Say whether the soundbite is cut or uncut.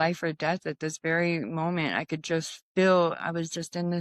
uncut